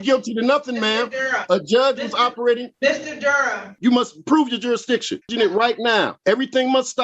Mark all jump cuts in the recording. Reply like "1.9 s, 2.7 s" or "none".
2.7 s, 3.8 s, 5.2 s, 6.1 s